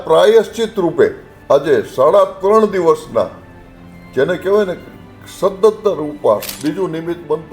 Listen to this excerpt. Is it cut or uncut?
cut